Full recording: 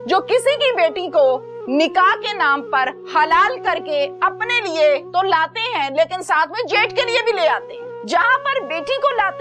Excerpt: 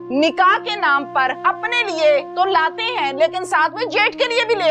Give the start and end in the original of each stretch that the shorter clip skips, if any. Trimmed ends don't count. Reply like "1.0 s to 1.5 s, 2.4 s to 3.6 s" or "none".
3.0 s to 4.2 s